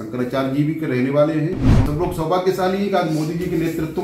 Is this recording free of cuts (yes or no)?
no